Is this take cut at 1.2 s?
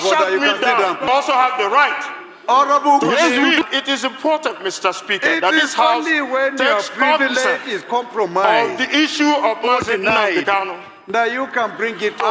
yes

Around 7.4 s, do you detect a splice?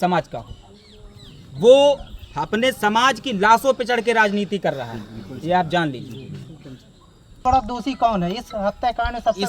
yes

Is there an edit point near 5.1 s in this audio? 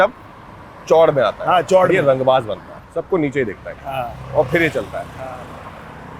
no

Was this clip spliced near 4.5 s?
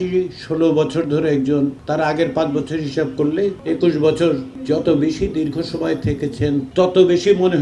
yes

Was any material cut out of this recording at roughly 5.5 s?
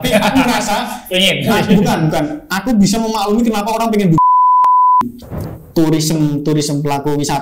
yes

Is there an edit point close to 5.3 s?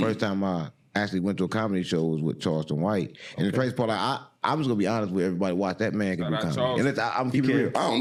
no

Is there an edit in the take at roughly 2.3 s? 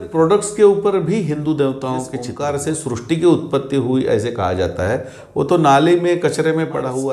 yes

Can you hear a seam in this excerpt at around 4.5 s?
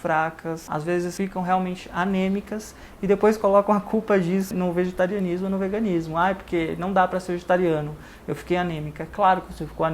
yes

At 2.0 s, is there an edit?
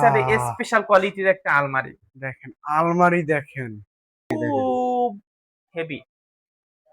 no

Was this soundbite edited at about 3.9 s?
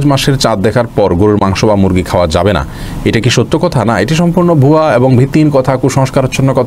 no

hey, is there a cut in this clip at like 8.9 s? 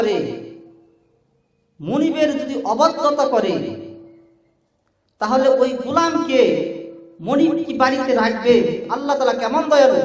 yes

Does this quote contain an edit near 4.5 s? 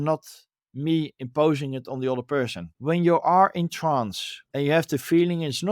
no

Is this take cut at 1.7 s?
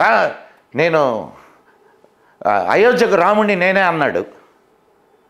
no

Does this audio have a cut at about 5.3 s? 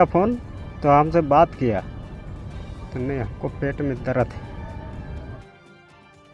yes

